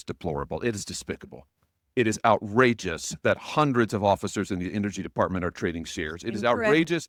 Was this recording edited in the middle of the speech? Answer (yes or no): no